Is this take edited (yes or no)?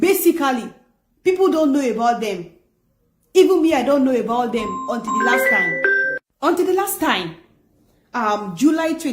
no